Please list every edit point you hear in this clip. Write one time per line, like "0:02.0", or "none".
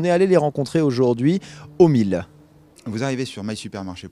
none

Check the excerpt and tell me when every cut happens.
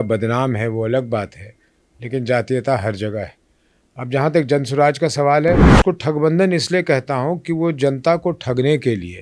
0:05.7

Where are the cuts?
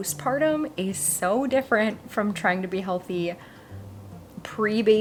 none

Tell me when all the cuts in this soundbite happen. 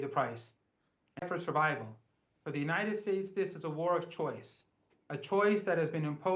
0:01.2

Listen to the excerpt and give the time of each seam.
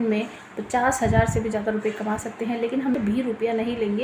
0:03.0

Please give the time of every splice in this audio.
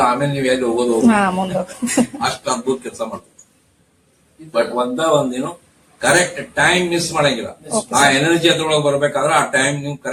none

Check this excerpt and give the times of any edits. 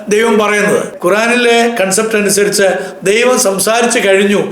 0:01.3

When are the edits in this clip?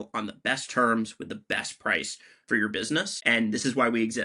0:03.1

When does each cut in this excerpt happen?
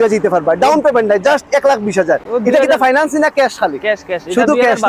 none

